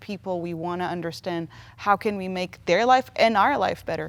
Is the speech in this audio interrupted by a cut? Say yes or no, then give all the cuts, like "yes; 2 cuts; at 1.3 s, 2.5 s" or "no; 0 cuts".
no; 0 cuts